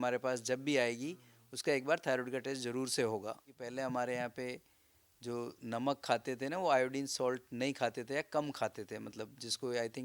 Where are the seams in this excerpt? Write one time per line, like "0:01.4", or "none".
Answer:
0:03.7